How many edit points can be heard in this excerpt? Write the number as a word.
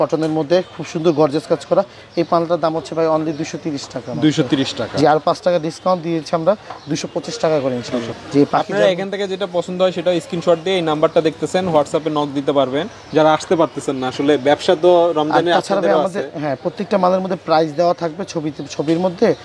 zero